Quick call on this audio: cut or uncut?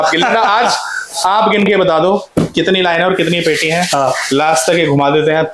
uncut